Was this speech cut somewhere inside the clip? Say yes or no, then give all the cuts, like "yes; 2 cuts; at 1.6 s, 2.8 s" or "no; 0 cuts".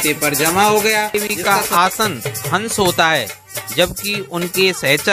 yes; 1 cut; at 1.3 s